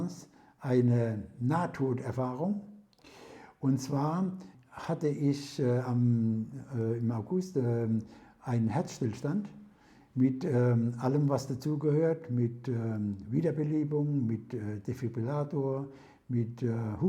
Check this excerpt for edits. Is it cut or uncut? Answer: cut